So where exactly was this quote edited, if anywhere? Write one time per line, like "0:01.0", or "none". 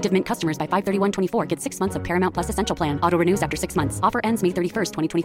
none